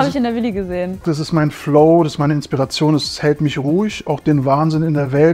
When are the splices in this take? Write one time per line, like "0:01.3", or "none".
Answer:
0:01.0